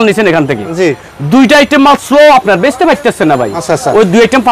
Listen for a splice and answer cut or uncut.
uncut